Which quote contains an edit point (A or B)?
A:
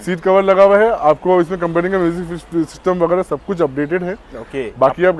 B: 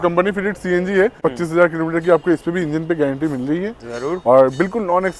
B